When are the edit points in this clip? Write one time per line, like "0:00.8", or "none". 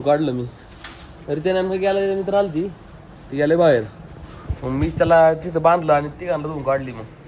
none